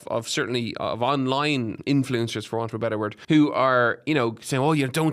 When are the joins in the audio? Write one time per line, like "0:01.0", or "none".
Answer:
0:01.8
0:03.2